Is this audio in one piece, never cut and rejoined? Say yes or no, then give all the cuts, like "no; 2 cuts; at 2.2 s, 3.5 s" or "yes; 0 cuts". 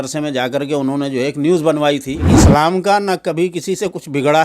no; 1 cut; at 2.3 s